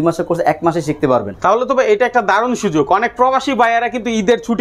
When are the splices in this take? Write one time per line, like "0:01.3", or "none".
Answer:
none